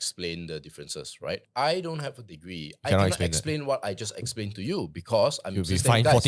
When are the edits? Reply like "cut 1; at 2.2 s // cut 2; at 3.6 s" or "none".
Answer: cut 1; at 1.5 s